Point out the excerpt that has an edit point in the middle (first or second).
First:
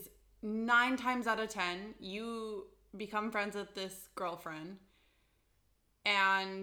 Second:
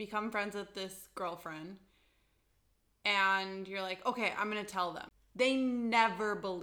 second